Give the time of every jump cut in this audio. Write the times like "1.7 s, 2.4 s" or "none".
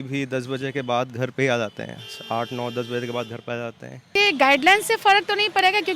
4.1 s